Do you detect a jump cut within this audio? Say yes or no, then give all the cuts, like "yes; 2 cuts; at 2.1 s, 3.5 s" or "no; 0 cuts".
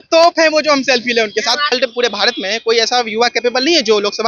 yes; 1 cut; at 1.7 s